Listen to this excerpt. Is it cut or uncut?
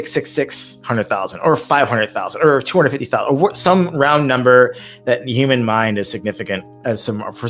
uncut